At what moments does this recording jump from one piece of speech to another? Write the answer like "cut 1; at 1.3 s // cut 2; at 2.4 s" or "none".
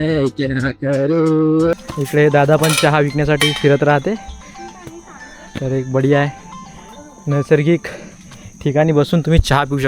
cut 1; at 1.7 s